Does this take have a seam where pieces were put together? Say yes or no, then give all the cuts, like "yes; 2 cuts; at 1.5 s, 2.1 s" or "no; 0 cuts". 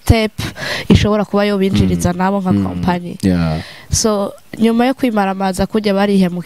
no; 0 cuts